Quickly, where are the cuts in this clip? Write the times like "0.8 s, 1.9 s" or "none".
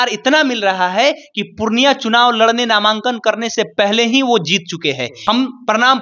5.1 s

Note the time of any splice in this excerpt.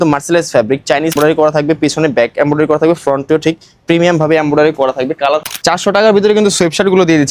1.1 s, 5.5 s

